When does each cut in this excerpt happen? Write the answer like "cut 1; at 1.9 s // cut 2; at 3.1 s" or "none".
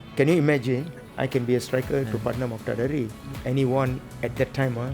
cut 1; at 1.0 s // cut 2; at 3.3 s // cut 3; at 4.1 s